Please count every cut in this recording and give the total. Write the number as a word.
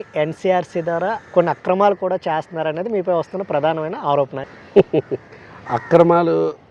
one